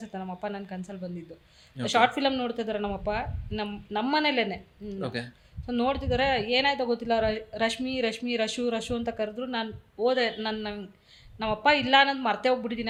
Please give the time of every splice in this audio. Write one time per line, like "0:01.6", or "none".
none